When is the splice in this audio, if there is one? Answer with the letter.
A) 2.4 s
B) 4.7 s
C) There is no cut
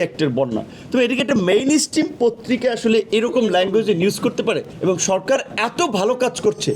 B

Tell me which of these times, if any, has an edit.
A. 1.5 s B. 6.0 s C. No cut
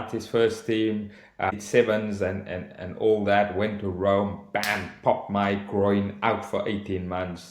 A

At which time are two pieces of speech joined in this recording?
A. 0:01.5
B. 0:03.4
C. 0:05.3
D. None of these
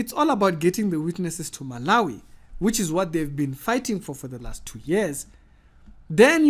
D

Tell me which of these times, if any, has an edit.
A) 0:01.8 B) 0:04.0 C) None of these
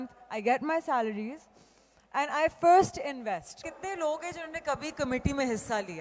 B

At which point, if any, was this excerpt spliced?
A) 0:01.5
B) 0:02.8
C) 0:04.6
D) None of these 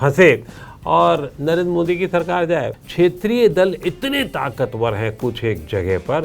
B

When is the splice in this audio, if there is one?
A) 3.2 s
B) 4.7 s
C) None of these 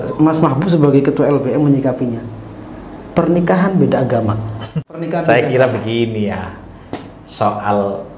B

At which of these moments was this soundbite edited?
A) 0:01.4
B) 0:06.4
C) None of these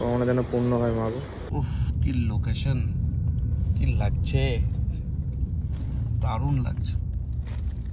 A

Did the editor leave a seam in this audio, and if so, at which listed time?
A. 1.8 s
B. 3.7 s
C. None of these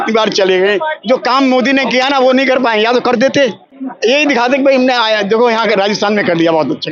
C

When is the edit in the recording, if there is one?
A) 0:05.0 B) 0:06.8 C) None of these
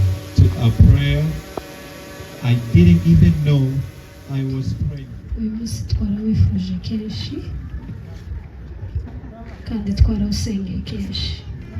A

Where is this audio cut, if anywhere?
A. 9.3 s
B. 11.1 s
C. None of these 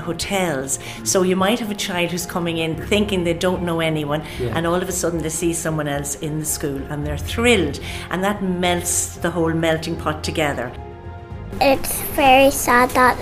B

